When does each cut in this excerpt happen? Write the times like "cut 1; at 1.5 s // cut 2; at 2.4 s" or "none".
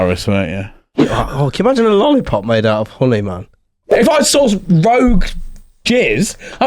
cut 1; at 1.0 s // cut 2; at 3.9 s

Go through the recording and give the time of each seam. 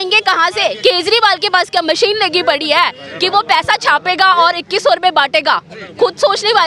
none

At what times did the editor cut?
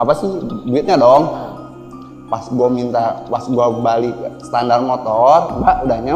none

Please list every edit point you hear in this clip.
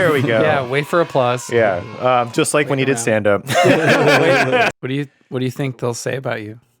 cut 1; at 4.7 s

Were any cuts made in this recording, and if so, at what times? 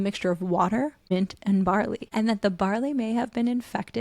cut 1; at 2.0 s

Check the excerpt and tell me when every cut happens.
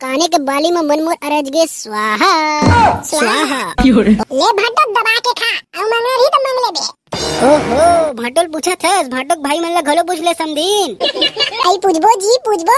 cut 1; at 4.2 s

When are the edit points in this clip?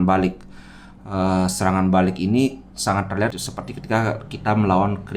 cut 1; at 3.5 s

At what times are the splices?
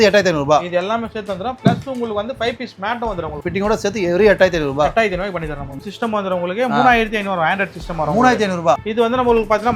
cut 1; at 3.4 s // cut 2; at 5.8 s // cut 3; at 8.8 s

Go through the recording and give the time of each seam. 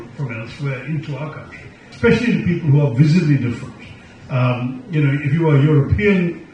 cut 1; at 1.9 s

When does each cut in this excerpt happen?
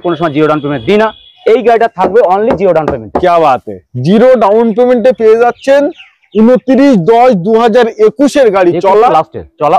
none

